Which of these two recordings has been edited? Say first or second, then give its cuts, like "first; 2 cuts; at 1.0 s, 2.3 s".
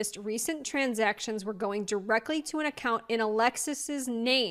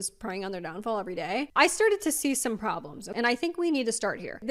second; 2 cuts; at 1.5 s, 3.0 s